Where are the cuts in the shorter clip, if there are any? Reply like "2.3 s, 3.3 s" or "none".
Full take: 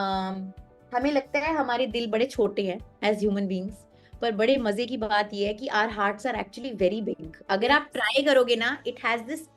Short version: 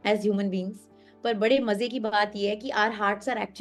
none